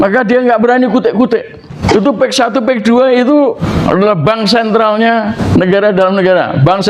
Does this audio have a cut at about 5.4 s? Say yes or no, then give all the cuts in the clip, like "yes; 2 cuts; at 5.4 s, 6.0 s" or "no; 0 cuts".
yes; 3 cuts; at 1.7 s, 3.6 s, 5.4 s